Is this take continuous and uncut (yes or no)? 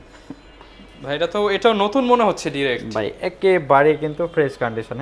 yes